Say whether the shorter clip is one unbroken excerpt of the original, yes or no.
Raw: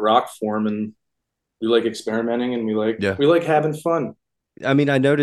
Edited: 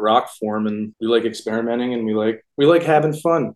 no